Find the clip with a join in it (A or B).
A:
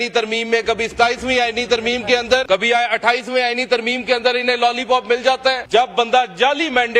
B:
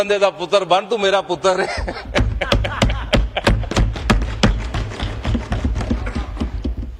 A